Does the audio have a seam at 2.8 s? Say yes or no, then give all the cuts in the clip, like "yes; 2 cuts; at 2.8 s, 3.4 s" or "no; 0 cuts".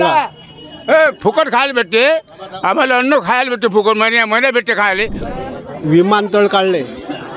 no; 1 cut; at 5.2 s